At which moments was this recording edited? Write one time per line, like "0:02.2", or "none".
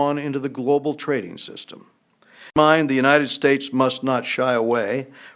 0:02.6

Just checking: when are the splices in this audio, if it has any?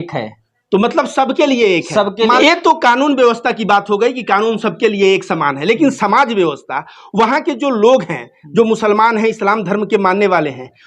0:02.4

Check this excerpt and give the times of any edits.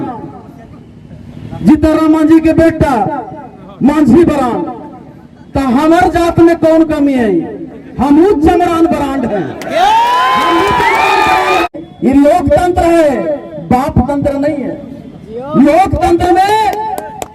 0:11.7

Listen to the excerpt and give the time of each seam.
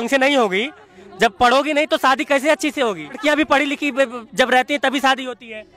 0:03.2

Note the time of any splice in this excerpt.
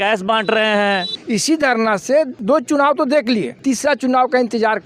0:01.1
0:02.4
0:03.5

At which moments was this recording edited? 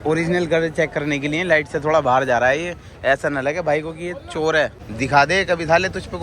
0:04.8

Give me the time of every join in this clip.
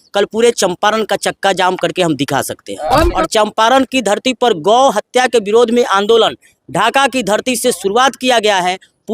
0:03.2

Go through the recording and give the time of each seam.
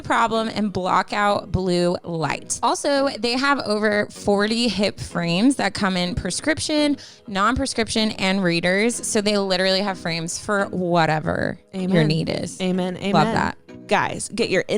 0:02.4
0:13.7

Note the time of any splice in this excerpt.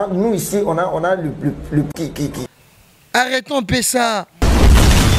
0:02.4
0:04.3

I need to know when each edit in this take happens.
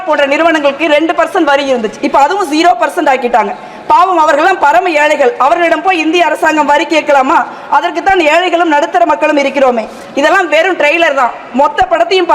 none

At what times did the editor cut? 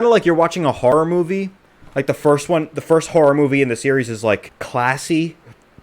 0:00.9
0:04.6

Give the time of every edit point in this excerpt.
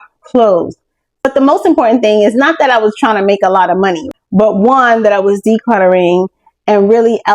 0:01.2
0:04.0

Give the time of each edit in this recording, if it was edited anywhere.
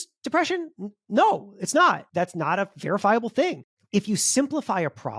0:02.0
0:03.8

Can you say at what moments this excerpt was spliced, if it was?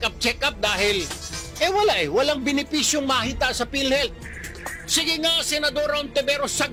none

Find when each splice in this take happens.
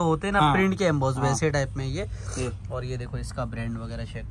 none

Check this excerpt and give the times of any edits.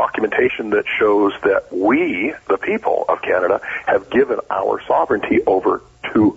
none

